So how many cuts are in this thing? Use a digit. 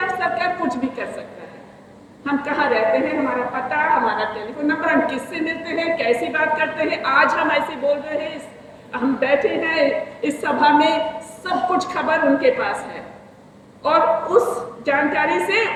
0